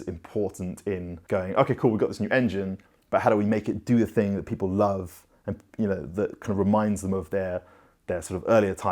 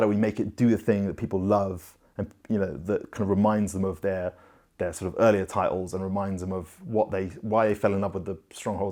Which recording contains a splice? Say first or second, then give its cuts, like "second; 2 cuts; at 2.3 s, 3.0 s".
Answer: first; 1 cut; at 1.1 s